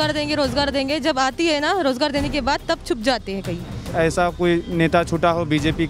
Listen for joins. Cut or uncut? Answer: cut